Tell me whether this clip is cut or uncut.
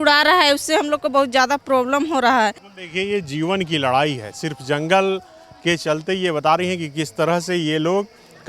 cut